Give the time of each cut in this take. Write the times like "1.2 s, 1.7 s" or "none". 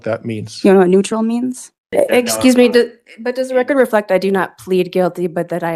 1.8 s